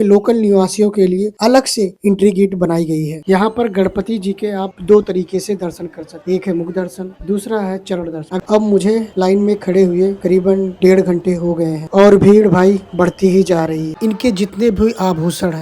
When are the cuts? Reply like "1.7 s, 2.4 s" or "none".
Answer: 3.1 s, 8.3 s, 13.9 s